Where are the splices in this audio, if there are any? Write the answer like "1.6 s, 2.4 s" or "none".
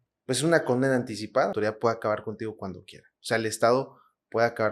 1.5 s

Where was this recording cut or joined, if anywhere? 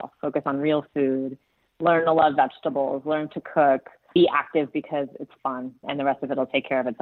4.1 s, 5.9 s

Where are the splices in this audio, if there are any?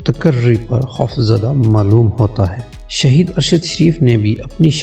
2.7 s

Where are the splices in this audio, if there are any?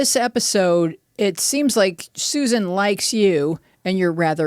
1.0 s

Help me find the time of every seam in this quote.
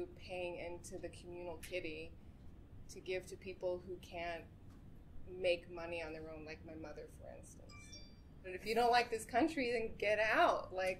8.6 s

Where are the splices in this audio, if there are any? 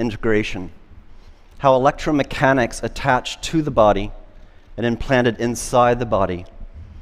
5.9 s

